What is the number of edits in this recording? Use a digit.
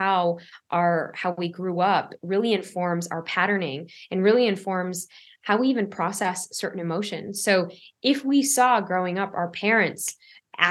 0